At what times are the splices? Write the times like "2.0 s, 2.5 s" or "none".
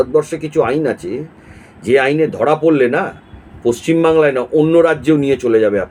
none